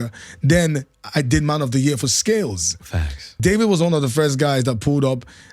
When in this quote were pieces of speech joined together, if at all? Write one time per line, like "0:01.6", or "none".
0:03.4